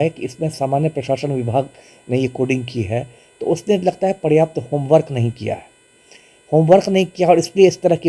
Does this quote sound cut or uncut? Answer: uncut